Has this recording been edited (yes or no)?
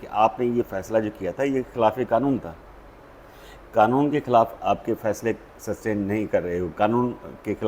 no